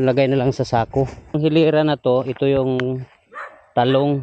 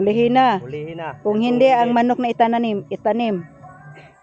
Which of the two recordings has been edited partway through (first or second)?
first